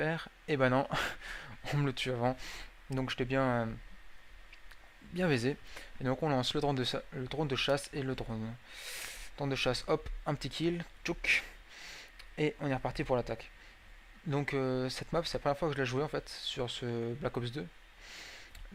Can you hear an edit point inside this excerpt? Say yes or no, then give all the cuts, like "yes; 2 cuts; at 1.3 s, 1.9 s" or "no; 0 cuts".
no; 0 cuts